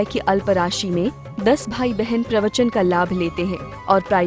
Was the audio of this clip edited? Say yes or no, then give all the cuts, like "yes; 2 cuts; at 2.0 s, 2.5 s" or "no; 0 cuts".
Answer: no; 0 cuts